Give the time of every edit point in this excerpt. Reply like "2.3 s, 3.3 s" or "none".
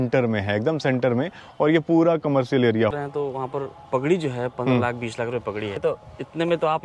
2.9 s, 5.8 s